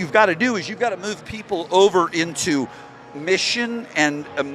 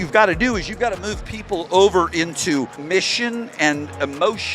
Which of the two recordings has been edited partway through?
second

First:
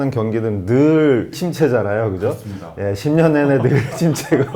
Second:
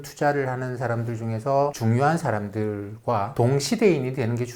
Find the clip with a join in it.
first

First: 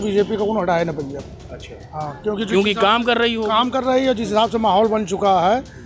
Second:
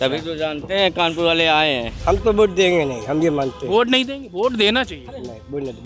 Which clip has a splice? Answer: second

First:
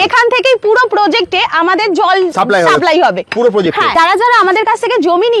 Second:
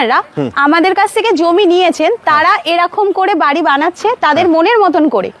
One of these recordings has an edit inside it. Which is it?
first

